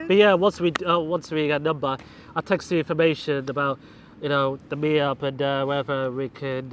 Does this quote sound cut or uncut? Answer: uncut